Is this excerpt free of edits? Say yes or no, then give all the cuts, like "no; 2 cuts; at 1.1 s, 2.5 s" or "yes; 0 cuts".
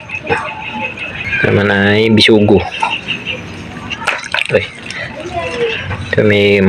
no; 1 cut; at 1.2 s